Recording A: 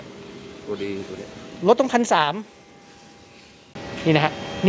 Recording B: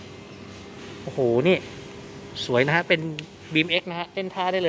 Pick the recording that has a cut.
A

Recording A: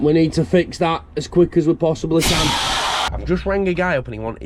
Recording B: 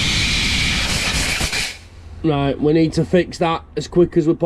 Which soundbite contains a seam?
A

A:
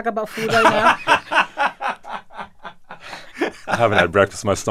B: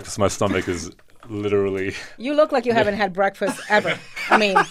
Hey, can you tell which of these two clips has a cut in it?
A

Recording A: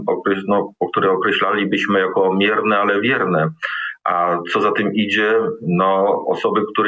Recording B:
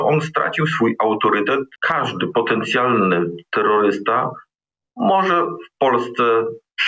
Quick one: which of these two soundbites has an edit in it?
B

